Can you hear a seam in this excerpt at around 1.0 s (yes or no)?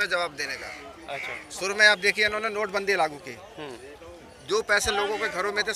no